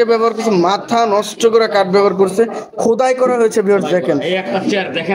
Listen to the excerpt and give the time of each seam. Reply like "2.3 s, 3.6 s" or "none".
none